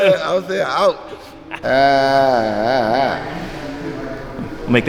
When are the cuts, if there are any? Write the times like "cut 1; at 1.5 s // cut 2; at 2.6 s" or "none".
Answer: cut 1; at 1.5 s